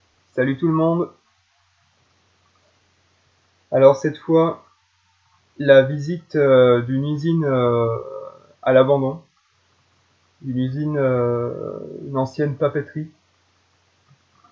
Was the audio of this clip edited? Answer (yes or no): no